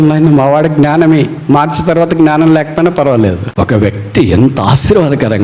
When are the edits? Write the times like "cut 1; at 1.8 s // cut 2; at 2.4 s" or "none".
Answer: cut 1; at 3.4 s